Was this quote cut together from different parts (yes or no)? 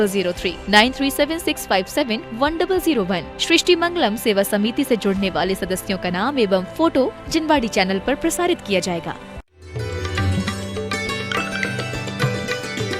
yes